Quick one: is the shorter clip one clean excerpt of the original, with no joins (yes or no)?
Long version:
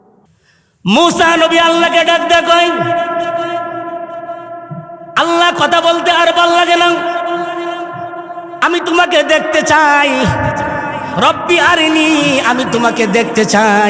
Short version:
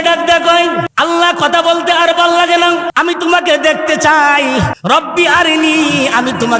no